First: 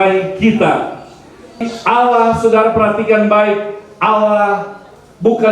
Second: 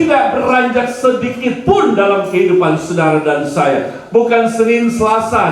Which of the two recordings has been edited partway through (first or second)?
first